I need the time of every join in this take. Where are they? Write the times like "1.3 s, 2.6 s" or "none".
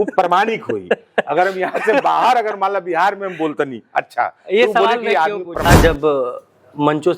5.7 s